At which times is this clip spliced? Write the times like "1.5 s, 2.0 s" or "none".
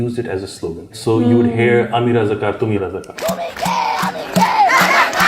1.0 s, 2.8 s